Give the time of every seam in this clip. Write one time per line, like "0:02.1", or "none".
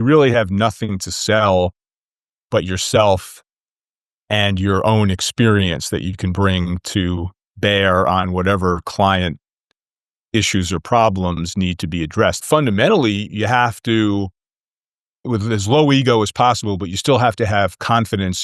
0:12.4
0:15.2